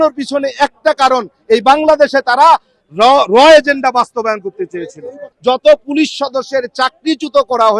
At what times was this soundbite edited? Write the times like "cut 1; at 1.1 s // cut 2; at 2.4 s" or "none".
cut 1; at 5.3 s

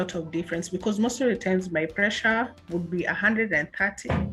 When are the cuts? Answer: none

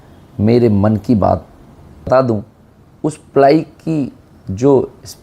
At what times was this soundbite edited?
cut 1; at 1.5 s

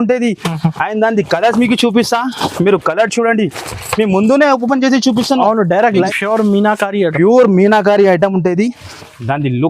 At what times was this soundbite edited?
cut 1; at 6.1 s

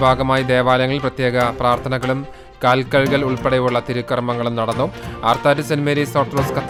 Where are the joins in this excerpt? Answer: none

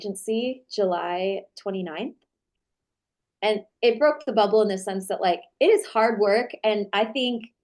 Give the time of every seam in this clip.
cut 1; at 2.4 s

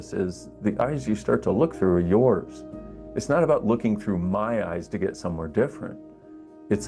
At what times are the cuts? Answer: none

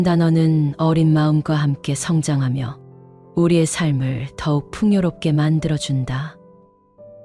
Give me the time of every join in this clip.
cut 1; at 6.3 s

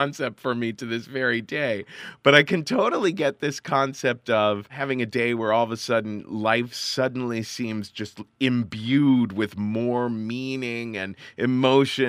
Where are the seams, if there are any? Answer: cut 1; at 4.7 s

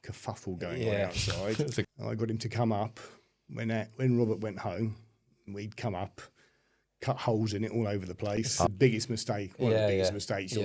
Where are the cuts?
cut 1; at 1.9 s // cut 2; at 8.7 s

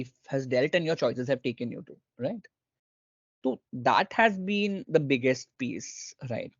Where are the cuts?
none

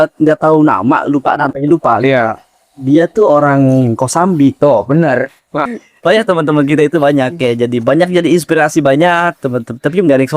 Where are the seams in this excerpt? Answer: cut 1; at 5.7 s

